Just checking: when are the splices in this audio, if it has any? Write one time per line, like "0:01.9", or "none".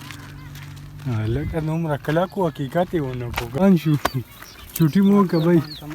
0:03.6